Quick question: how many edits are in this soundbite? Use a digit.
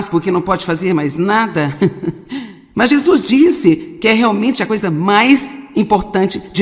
1